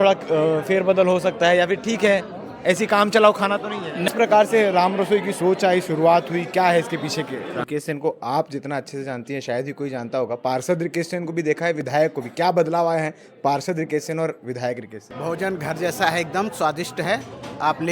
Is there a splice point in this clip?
yes; 3 cuts; at 4.1 s, 7.6 s, 15.1 s

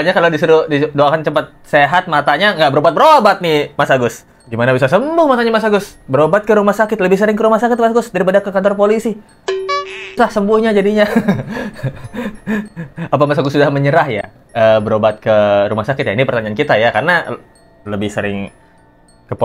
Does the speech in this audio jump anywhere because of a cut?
no; 0 cuts

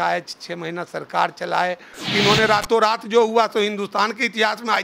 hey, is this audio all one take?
no; 1 cut; at 2.0 s

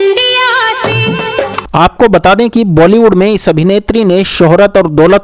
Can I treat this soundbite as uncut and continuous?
no; 1 cut; at 1.6 s

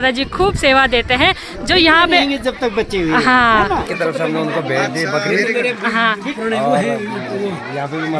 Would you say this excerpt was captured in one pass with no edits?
no; 1 cut; at 3.9 s

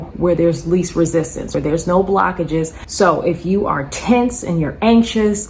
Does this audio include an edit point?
yes; 2 cuts; at 1.5 s, 2.8 s

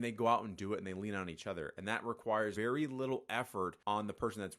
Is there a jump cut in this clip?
no; 0 cuts

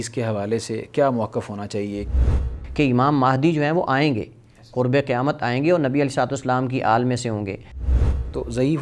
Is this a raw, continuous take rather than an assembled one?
no; 2 cuts; at 2.1 s, 7.8 s

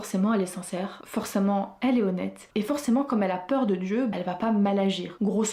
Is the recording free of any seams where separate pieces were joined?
yes; 0 cuts

